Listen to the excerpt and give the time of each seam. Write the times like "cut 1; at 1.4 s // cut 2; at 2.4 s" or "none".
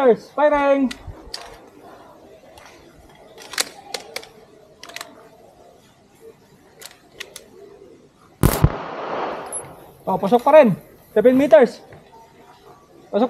none